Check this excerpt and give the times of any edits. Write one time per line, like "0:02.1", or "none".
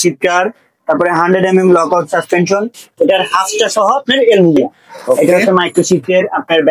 0:05.2